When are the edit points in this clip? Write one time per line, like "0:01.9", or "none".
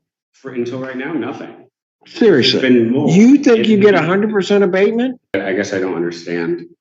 0:05.3